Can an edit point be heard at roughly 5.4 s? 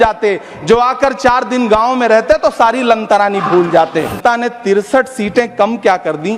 no; 1 cut; at 4.1 s

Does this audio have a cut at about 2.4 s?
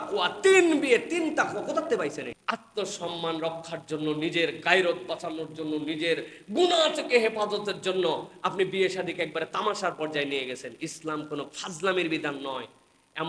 yes; 1 cut; at 2.4 s

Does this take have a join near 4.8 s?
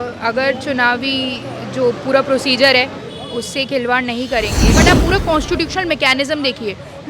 yes; 1 cut; at 4.8 s

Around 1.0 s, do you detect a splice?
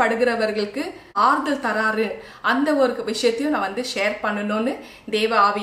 yes; 1 cut; at 1.0 s

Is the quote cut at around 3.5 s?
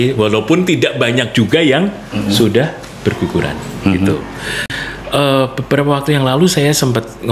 no; 1 cut; at 4.8 s

